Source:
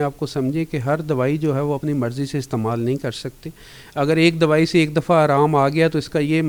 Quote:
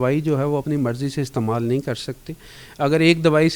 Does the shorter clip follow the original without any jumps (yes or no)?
yes